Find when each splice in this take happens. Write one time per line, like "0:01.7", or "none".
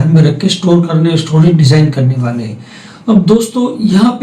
none